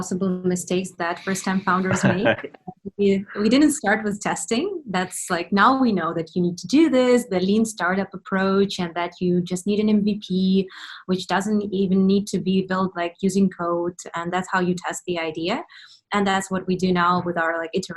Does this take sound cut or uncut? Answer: uncut